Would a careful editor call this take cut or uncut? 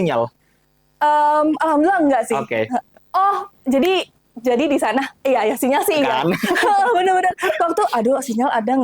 uncut